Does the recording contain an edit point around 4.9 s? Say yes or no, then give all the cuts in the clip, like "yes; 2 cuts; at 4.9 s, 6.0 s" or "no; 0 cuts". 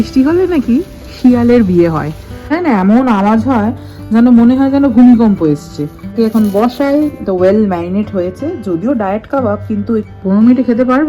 no; 3 cuts; at 2.6 s, 6.1 s, 10.1 s